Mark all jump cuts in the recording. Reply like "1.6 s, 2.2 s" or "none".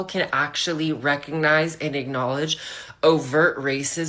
1.5 s